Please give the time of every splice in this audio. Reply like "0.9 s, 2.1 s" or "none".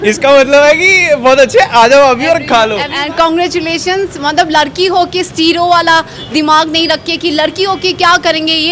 2.9 s